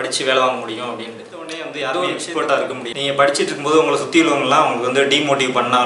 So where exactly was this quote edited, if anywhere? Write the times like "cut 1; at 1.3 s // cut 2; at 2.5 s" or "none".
cut 1; at 1.8 s // cut 2; at 2.9 s

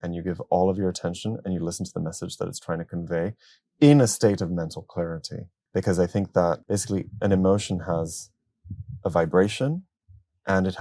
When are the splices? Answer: cut 1; at 6.6 s

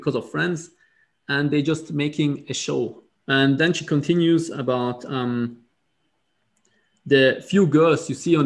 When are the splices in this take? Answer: cut 1; at 3.1 s

